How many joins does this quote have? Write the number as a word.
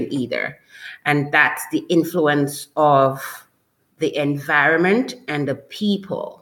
zero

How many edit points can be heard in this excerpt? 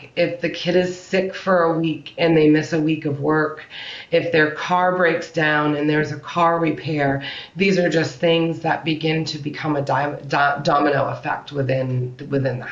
zero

